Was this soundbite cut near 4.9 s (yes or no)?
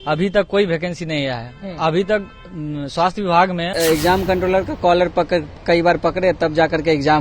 no